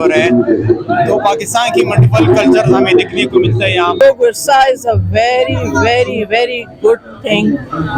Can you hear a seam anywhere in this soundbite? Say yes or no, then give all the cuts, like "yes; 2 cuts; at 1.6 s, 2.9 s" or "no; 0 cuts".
yes; 1 cut; at 4.0 s